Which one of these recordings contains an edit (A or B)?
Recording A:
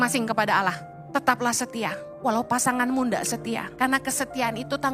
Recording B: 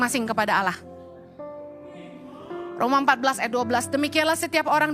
A